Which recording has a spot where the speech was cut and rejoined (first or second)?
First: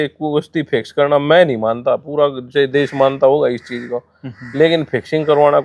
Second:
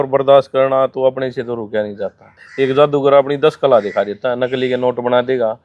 second